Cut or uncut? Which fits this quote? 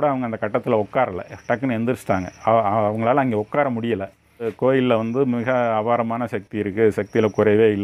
cut